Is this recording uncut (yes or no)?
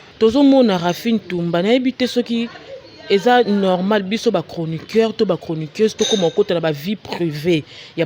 yes